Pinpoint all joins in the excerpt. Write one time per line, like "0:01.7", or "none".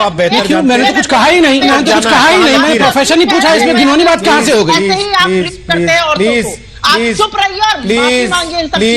none